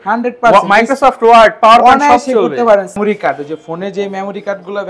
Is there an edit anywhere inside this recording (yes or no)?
yes